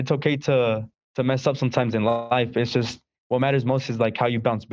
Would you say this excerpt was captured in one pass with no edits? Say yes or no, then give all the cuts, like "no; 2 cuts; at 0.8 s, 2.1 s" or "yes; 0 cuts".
no; 1 cut; at 1.0 s